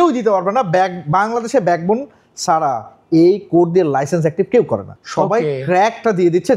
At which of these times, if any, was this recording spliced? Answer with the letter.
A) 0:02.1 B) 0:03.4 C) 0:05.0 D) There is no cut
C